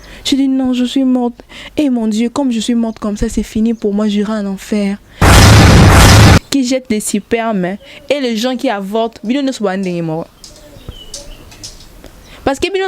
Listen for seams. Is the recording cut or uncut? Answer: cut